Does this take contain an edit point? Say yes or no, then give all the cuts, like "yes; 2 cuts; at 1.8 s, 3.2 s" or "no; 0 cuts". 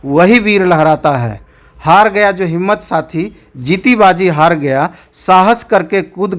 no; 0 cuts